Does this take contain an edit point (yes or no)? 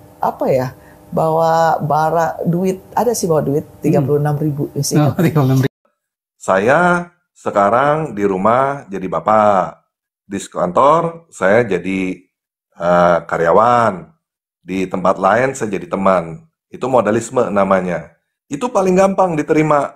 yes